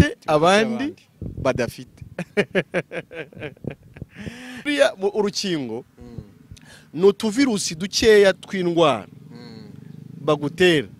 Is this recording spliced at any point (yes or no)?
yes